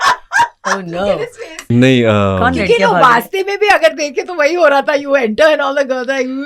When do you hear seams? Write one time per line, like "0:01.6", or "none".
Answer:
0:01.7